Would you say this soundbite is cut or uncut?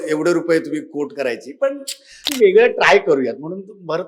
cut